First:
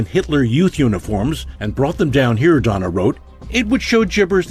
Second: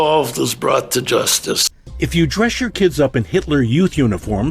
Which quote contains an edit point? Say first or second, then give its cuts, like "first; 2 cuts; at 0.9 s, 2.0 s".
second; 1 cut; at 1.7 s